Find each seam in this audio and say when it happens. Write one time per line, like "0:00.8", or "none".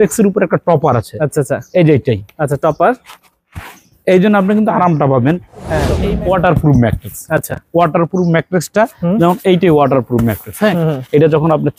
0:05.9